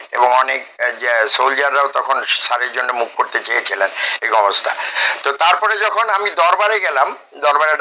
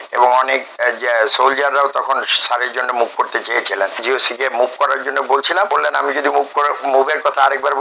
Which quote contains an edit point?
second; 2 cuts; at 4.0 s, 5.7 s

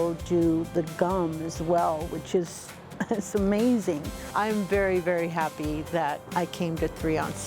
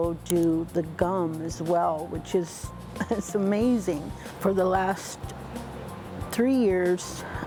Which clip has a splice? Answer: first; 2 cuts; at 4.3 s, 6.2 s

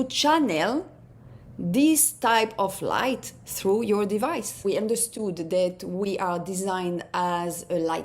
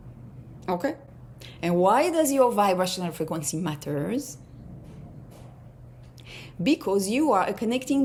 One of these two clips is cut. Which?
first; 1 cut; at 4.6 s

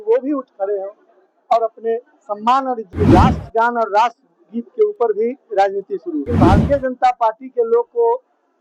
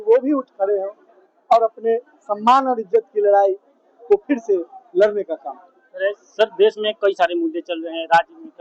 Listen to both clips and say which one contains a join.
first; 2 cuts; at 2.8 s, 6.3 s

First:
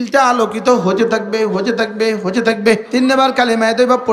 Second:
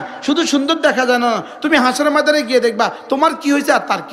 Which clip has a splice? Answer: first; 1 cut; at 2.8 s

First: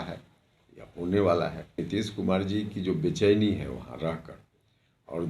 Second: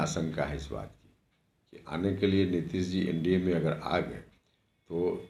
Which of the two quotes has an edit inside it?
first; 1 cut; at 1.8 s

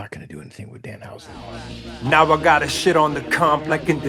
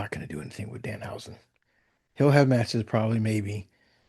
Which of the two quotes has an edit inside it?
first; 1 cut; at 1.3 s

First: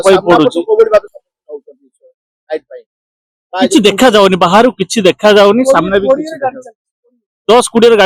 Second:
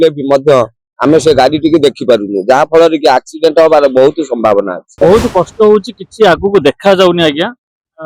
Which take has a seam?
second; 1 cut; at 5.0 s

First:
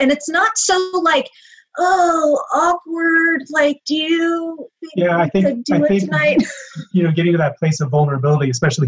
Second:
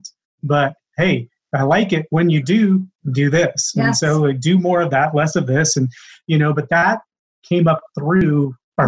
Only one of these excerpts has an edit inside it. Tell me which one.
second; 2 cuts; at 6.8 s, 8.2 s

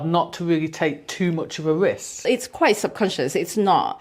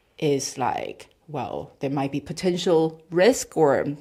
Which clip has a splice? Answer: first; 1 cut; at 2.2 s

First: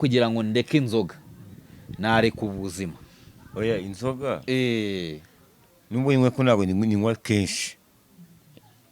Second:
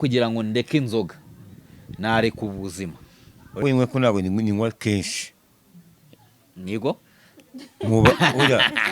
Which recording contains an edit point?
second; 1 cut; at 3.6 s

